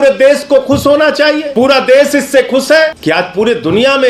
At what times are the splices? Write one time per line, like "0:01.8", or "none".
0:01.5
0:03.0